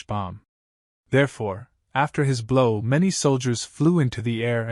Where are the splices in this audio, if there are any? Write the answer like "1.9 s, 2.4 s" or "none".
none